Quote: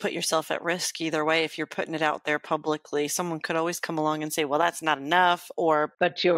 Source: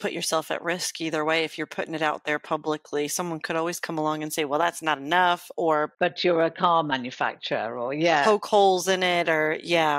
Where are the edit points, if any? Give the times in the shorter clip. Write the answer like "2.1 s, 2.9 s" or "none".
none